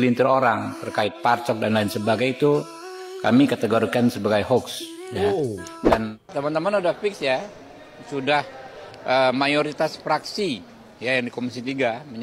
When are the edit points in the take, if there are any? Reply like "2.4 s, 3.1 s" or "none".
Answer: 5.9 s